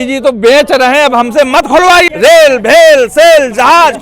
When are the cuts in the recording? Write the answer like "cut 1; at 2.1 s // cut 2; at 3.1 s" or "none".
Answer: cut 1; at 2.1 s